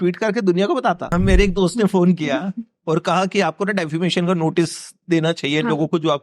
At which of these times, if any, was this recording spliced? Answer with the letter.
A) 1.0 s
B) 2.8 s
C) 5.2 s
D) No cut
A